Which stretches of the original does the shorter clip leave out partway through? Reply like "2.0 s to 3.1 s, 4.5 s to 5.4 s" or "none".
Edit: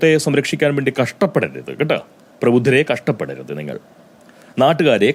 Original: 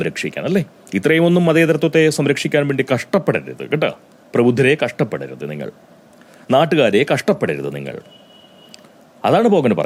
none